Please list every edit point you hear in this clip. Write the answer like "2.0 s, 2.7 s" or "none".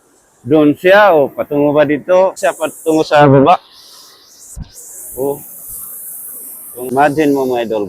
2.4 s, 6.9 s

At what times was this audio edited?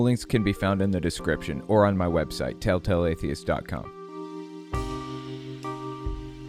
4.0 s

